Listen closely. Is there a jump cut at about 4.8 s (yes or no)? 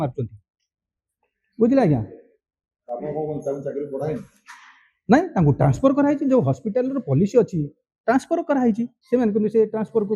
no